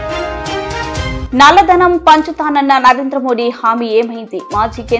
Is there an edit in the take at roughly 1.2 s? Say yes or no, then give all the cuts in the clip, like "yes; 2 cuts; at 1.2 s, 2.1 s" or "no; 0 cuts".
yes; 1 cut; at 1.2 s